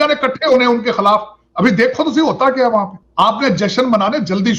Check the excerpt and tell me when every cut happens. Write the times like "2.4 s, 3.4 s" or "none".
3.0 s